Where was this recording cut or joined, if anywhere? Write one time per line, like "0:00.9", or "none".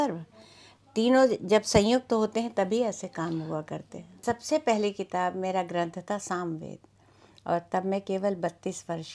0:04.2